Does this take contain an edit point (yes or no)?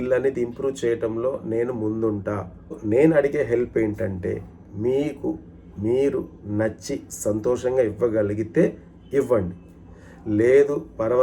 yes